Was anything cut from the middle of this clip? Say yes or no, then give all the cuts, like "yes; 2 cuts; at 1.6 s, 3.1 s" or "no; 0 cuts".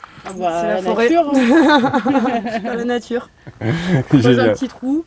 no; 0 cuts